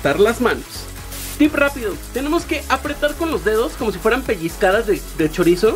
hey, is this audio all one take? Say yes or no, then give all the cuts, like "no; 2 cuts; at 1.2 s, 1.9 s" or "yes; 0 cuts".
no; 1 cut; at 0.9 s